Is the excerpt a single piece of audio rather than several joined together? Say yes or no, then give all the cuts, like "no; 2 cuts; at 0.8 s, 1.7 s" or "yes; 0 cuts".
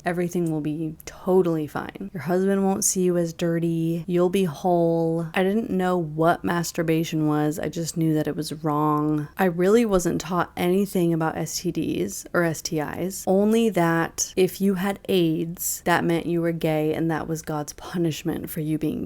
no; 1 cut; at 1.0 s